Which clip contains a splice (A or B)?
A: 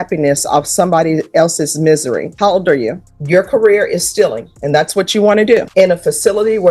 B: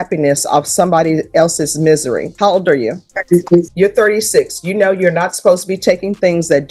A